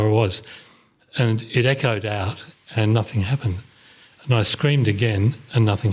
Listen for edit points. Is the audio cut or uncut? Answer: uncut